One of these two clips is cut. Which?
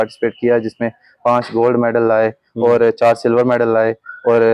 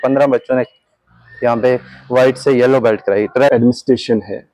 second; 1 cut; at 3.5 s

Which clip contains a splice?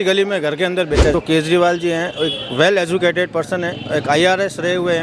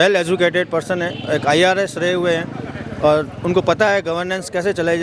first; 1 cut; at 1.1 s

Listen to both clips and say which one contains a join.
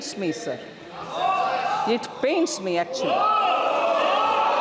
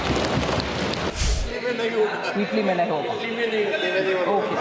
second; 1 cut; at 1.1 s

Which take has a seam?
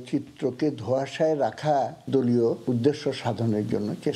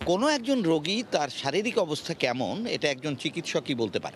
first; 1 cut; at 2.0 s

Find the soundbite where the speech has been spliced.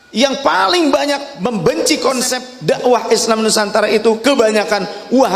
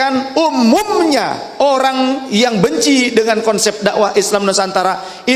first; 2 cuts; at 1.3 s, 2.5 s

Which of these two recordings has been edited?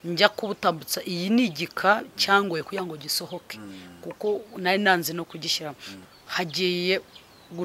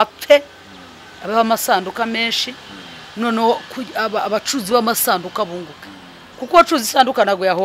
first; 1 cut; at 6.0 s

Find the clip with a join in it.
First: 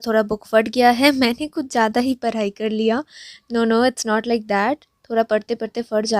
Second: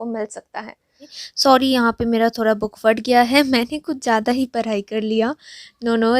second; 1 cut; at 1.2 s

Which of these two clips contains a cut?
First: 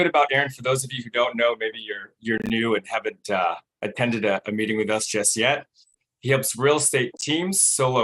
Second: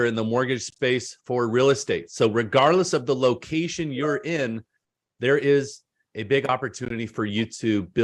first; 1 cut; at 6.0 s

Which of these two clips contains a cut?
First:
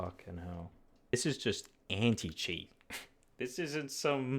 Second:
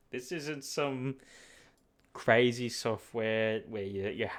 first; 1 cut; at 1.1 s

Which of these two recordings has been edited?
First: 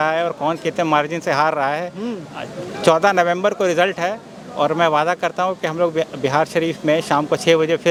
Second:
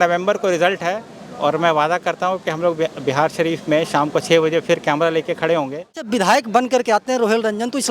second; 1 cut; at 6.0 s

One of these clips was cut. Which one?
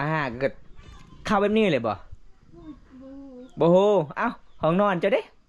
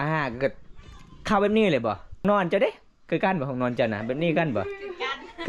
second; 1 cut; at 2.2 s

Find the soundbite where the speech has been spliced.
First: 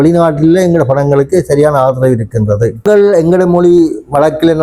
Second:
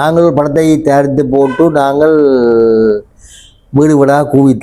first; 1 cut; at 2.8 s

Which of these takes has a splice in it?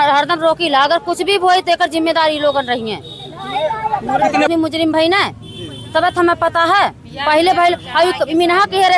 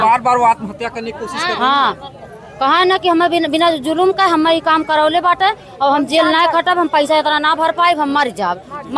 first; 1 cut; at 4.5 s

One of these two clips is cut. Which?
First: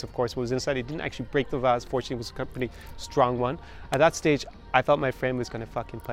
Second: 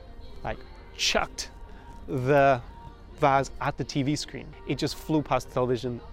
second; 1 cut; at 4.5 s

